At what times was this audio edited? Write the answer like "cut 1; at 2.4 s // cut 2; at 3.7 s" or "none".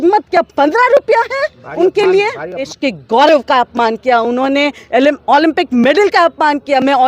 cut 1; at 2.7 s